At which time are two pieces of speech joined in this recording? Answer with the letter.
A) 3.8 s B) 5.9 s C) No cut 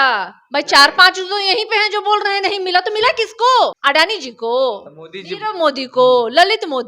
A